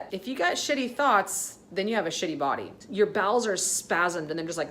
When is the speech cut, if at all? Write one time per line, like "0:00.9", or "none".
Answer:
0:02.8